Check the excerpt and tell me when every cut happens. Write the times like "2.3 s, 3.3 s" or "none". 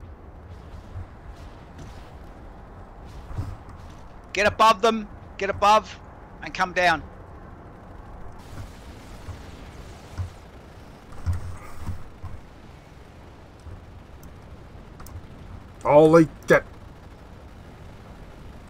none